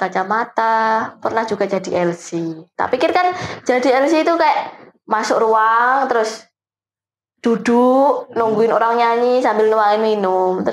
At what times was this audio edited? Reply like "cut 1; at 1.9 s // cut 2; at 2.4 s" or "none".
cut 1; at 2.6 s